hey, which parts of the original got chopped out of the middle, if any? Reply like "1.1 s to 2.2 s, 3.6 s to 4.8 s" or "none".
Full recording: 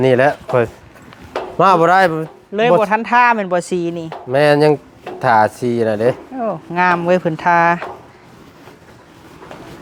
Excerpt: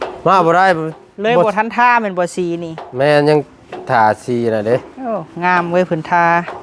none